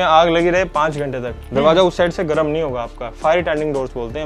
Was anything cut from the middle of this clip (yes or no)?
no